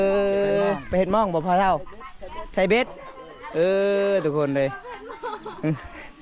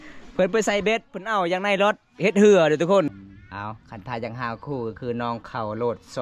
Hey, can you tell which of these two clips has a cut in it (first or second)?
second